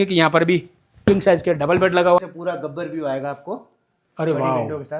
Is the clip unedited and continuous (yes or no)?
no